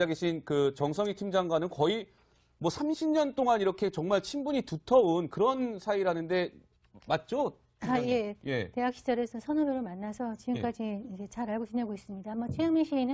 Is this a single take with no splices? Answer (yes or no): yes